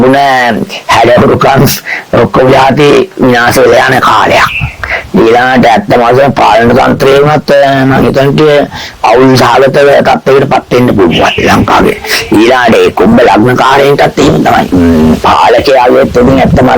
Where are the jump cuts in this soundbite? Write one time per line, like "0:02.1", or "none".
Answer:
0:14.7